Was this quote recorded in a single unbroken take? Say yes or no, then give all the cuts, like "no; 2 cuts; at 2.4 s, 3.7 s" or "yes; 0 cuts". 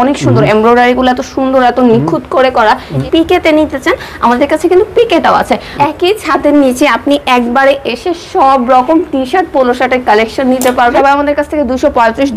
no; 3 cuts; at 3.0 s, 5.7 s, 11.0 s